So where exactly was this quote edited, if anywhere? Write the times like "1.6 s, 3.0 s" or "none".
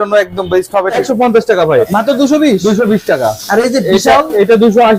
1.0 s, 1.9 s